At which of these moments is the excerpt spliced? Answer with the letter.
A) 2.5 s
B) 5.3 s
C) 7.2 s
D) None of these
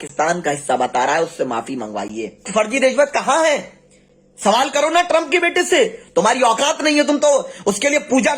A